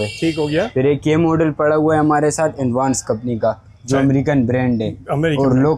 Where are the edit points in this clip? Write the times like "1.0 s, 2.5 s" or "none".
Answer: none